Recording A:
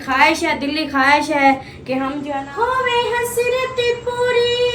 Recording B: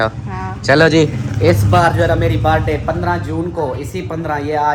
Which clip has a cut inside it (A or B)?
A